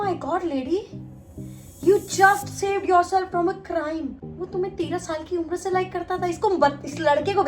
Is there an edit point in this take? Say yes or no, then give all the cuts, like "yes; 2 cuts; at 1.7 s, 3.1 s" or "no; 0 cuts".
yes; 1 cut; at 4.2 s